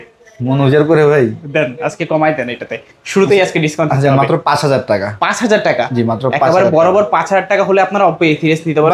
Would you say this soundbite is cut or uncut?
uncut